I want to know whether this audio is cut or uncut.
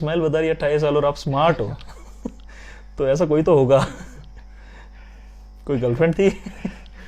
uncut